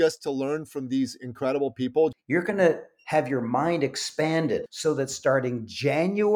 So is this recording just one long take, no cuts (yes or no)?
no